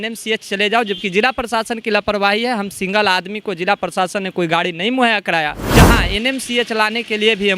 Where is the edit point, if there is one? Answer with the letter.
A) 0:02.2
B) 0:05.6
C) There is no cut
B